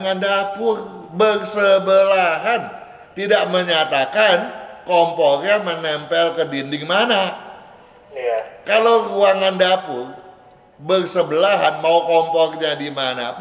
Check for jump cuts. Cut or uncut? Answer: uncut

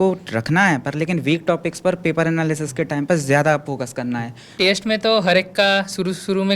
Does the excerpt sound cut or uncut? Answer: cut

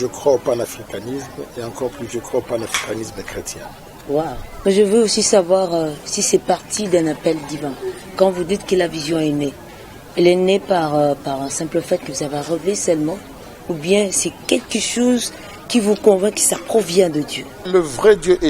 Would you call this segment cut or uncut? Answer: cut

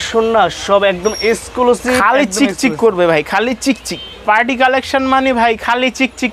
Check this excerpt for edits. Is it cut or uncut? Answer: uncut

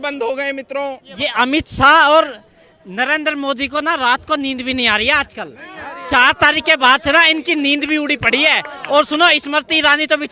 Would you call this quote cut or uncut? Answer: cut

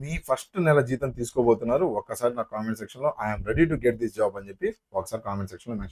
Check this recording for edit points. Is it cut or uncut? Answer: uncut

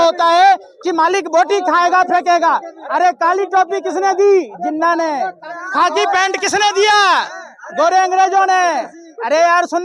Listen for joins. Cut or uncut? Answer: uncut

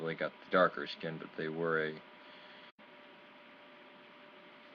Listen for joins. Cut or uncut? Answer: uncut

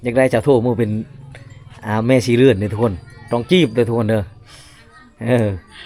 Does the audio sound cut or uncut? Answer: uncut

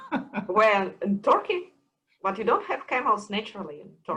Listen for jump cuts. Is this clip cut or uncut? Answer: uncut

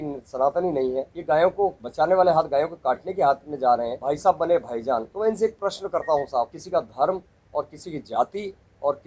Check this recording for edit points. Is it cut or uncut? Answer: cut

